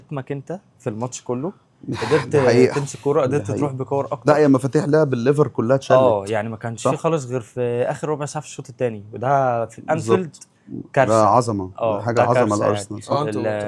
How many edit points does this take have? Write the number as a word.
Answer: zero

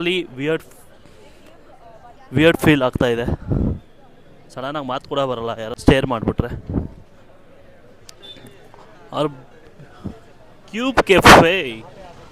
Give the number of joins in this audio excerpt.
one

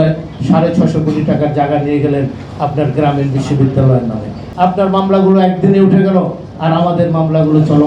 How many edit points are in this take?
one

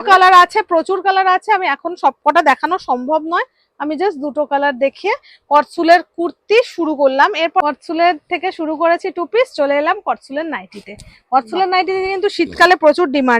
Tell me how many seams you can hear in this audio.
zero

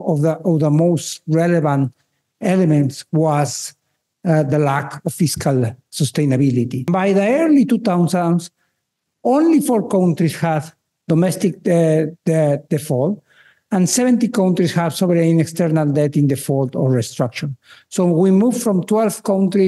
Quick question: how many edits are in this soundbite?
one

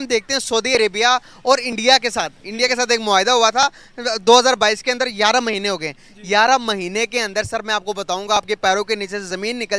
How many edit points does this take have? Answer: zero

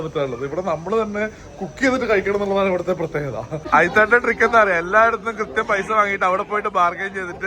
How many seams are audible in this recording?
one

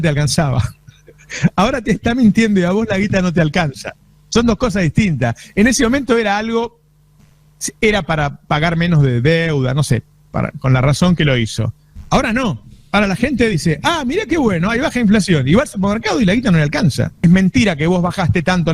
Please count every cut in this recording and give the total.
one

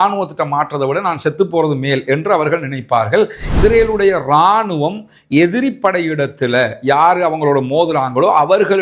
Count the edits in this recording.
one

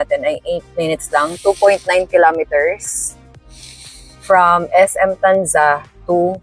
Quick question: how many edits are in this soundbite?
zero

